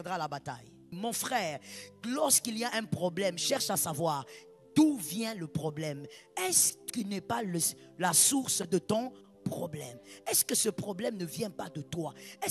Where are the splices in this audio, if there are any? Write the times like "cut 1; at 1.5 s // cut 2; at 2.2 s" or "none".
cut 1; at 1.0 s